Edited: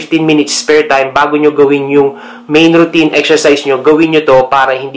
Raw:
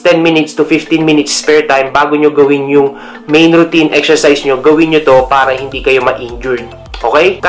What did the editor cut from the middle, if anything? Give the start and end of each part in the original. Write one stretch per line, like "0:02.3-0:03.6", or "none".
none